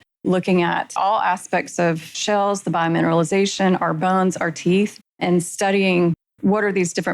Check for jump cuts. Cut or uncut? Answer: cut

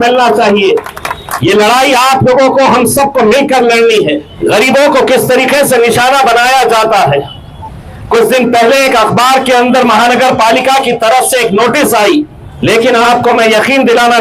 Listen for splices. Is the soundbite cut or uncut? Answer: cut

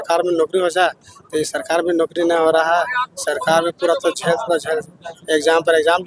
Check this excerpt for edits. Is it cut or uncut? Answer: uncut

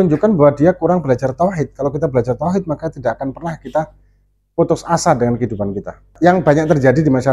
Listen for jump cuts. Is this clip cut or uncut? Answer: cut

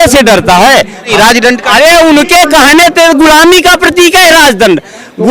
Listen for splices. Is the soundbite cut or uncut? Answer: cut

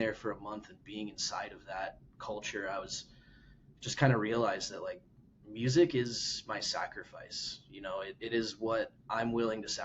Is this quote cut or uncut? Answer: uncut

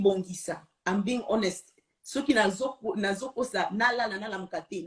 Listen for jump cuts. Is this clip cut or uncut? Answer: uncut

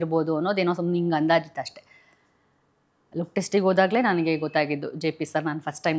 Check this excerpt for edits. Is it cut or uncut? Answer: uncut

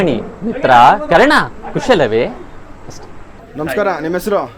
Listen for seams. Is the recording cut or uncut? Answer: cut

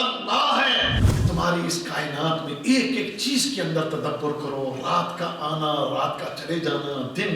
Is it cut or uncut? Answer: cut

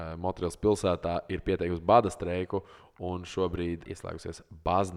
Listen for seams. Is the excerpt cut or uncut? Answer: cut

